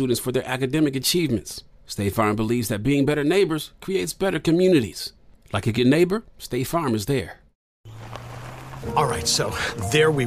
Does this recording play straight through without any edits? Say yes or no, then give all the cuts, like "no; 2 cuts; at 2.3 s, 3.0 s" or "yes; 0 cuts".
no; 1 cut; at 7.7 s